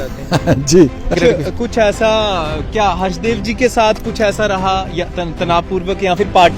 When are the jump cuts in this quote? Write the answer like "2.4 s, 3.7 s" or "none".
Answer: 1.2 s